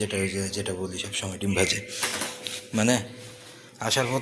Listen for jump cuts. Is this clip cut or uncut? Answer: uncut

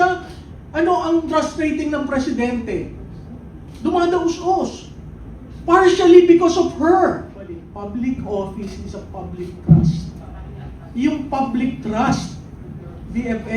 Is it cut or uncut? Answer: cut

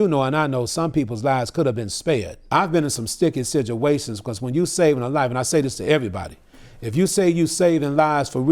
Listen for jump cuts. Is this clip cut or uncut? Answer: cut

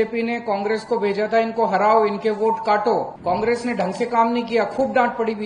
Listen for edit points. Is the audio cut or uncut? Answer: cut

